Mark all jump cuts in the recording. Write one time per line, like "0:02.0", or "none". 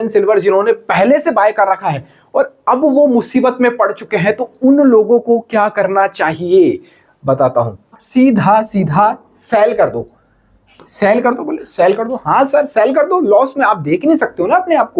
0:08.0